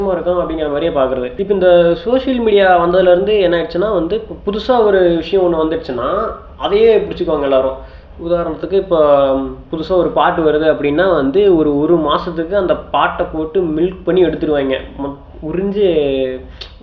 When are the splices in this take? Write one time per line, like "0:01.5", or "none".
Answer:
none